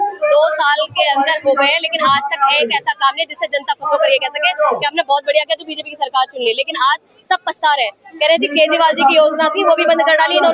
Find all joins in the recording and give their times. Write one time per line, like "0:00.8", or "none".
none